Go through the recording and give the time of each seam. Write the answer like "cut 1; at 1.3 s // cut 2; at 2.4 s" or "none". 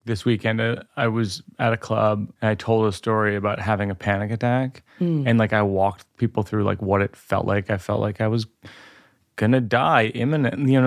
cut 1; at 0.9 s // cut 2; at 1.4 s // cut 3; at 2.3 s